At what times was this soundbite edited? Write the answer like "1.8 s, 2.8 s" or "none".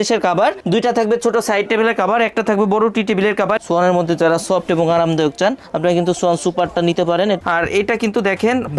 3.6 s, 7.4 s